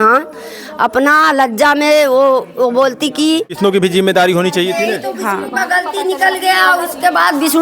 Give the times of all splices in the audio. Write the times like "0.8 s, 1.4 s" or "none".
3.6 s